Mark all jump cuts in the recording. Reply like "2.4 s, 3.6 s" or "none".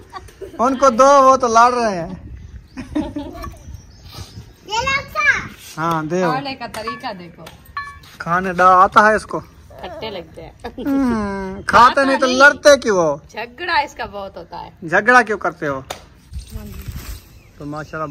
16.4 s